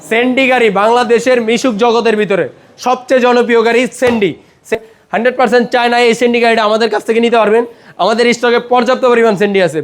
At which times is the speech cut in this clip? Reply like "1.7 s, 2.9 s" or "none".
4.8 s